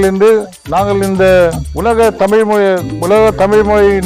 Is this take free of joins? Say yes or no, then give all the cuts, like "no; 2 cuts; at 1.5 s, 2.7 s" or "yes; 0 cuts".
yes; 0 cuts